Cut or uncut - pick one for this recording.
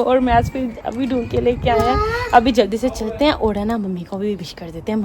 uncut